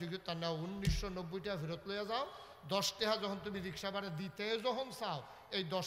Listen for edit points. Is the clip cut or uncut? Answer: uncut